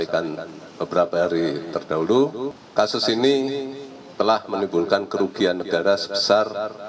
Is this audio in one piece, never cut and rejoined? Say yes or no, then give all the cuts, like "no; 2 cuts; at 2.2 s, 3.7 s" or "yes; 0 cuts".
no; 1 cut; at 2.6 s